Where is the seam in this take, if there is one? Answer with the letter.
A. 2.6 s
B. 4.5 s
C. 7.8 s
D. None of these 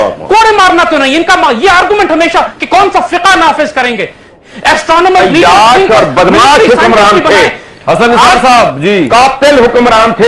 B